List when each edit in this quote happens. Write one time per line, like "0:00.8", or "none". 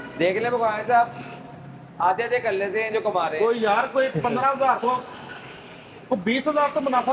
none